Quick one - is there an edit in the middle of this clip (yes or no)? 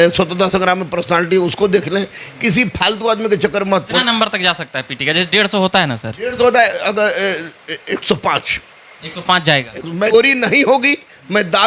yes